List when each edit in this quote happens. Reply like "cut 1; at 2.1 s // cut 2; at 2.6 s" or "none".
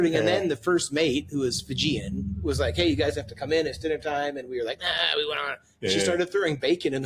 none